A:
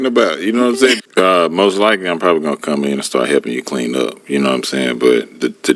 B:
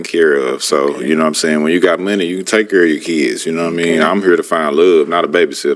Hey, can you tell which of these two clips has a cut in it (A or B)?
A